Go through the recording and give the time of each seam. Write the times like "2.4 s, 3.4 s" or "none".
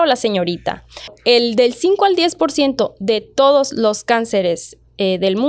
1.2 s